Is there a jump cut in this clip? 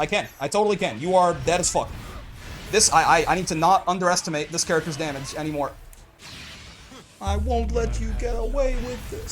no; 0 cuts

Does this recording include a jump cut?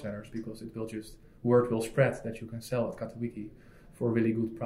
no; 0 cuts

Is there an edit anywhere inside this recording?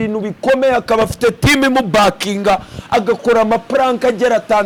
no; 0 cuts

